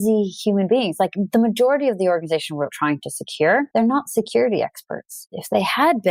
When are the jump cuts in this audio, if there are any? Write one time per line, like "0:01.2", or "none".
0:03.7
0:05.2